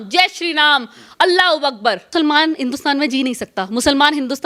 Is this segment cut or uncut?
uncut